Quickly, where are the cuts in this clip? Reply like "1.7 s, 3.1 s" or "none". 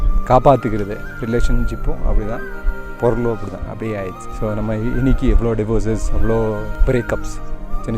4.2 s, 6.7 s

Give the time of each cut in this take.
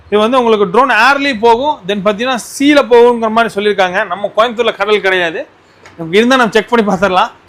none

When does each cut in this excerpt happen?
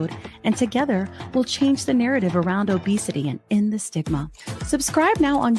none

